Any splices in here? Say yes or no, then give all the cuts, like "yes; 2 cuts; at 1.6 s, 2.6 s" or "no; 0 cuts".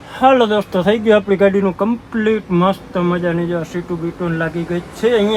no; 0 cuts